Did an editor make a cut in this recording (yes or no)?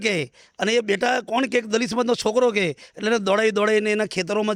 no